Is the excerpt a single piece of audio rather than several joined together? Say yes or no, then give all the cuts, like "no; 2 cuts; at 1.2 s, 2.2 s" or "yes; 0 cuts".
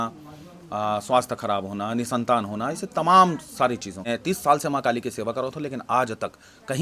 no; 1 cut; at 4.0 s